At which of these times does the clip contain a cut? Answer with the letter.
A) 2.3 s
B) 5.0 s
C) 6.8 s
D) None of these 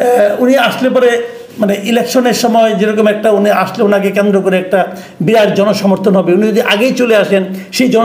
D